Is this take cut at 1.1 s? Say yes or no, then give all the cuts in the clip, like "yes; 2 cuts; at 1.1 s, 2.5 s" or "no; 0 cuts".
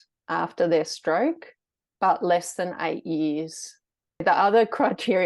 no; 1 cut; at 4.2 s